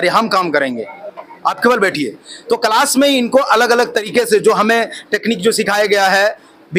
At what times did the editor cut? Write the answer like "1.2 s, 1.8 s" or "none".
none